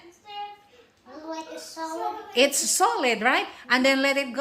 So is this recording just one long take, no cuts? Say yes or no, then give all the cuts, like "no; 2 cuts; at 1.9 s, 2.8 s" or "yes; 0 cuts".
yes; 0 cuts